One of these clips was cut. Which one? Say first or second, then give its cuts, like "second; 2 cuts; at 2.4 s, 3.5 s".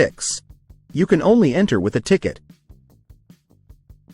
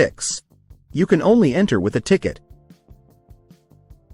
first; 1 cut; at 2.4 s